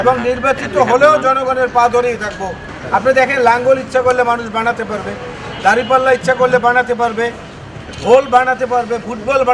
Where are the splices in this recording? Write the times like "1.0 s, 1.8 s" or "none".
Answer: 2.6 s